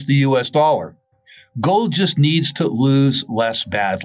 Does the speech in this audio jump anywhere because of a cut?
no; 0 cuts

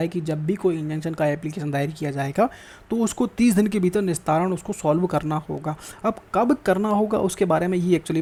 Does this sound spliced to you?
no; 0 cuts

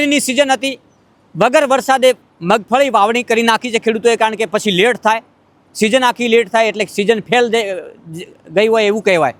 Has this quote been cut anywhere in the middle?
no; 0 cuts

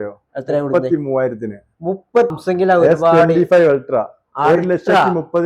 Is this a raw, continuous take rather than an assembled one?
no; 1 cut; at 2.3 s

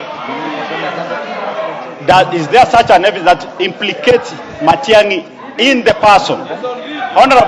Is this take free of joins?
yes; 0 cuts

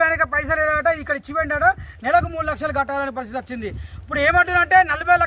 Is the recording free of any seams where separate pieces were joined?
yes; 0 cuts

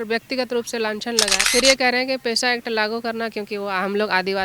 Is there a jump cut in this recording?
yes; 1 cut; at 1.4 s

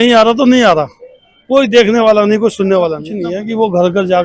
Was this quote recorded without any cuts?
no; 1 cut; at 3.1 s

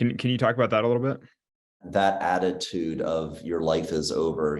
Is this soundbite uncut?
no; 1 cut; at 1.8 s

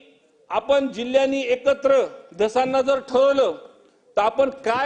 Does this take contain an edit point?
no; 0 cuts

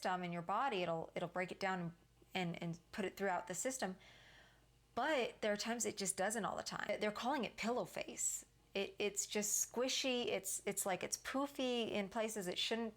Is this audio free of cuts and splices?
no; 1 cut; at 6.9 s

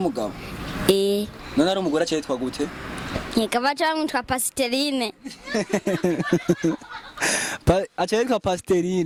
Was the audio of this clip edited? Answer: no; 0 cuts

